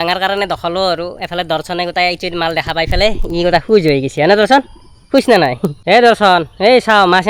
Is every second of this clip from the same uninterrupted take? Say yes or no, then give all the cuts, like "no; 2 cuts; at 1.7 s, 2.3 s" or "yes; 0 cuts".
no; 1 cut; at 5.8 s